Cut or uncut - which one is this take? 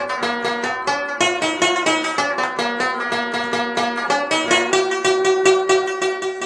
uncut